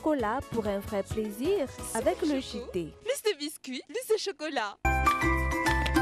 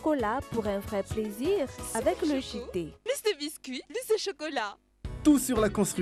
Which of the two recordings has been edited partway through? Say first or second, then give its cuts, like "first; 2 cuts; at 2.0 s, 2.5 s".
first; 1 cut; at 4.7 s